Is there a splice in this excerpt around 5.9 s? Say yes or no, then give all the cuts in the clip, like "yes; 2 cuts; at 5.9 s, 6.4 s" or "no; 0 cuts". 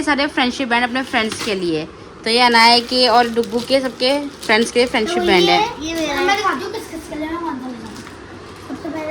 no; 0 cuts